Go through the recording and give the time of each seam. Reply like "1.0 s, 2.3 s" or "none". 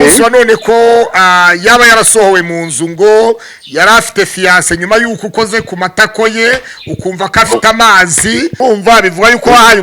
8.6 s